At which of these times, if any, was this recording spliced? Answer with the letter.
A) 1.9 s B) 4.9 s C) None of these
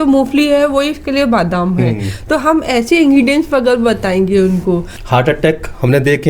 B